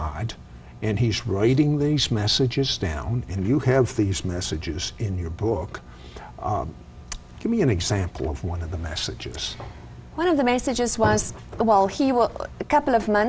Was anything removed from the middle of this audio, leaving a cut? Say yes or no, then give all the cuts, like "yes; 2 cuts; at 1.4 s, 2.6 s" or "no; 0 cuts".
no; 0 cuts